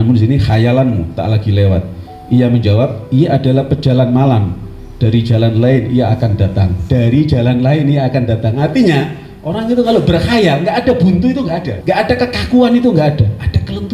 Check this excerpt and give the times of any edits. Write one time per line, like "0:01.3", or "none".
0:11.7